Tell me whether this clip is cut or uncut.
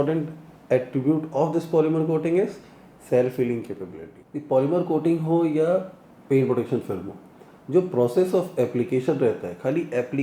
cut